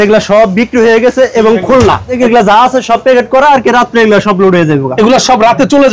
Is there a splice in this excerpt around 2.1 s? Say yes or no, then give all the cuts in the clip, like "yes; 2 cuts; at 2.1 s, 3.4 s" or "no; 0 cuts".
yes; 1 cut; at 2.1 s